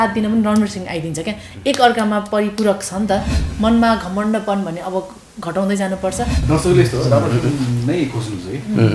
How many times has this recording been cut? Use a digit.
2